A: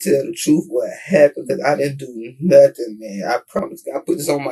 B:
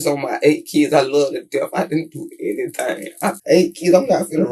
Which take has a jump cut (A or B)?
B